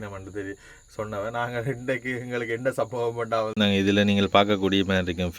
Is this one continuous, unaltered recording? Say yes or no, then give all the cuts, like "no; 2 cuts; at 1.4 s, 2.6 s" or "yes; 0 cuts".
no; 1 cut; at 3.5 s